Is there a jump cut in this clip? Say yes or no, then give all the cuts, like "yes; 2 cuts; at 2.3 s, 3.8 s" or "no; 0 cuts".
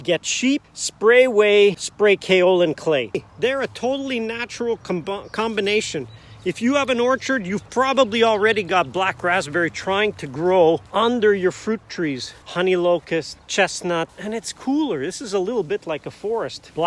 yes; 2 cuts; at 3.1 s, 12.4 s